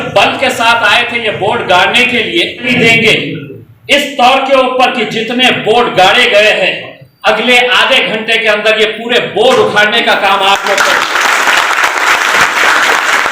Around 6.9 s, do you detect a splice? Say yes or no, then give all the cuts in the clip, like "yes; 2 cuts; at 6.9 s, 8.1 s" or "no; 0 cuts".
no; 1 cut; at 2.7 s